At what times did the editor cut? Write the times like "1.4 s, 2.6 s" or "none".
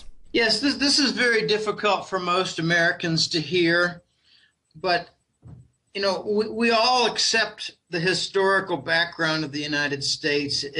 4.6 s